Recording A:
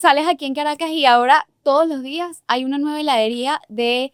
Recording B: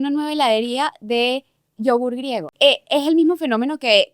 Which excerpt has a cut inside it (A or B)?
B